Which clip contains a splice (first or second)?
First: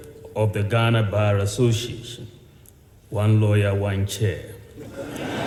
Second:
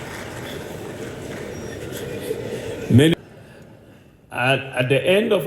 second